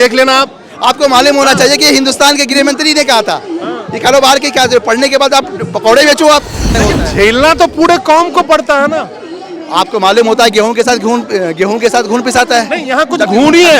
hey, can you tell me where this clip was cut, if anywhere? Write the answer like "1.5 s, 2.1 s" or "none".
6.8 s